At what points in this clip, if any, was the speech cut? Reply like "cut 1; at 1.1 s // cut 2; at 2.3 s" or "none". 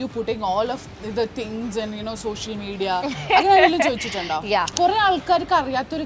cut 1; at 4.7 s